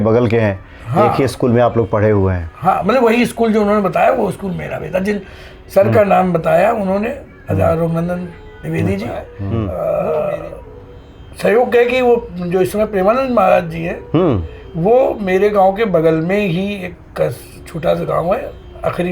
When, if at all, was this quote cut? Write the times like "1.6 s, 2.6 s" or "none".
9.4 s